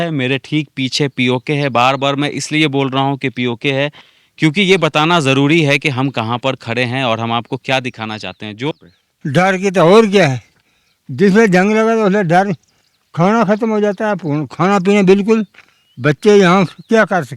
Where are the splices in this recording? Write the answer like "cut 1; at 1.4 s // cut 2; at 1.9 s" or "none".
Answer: cut 1; at 8.7 s